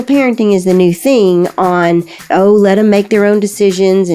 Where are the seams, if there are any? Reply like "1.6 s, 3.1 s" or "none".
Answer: 2.2 s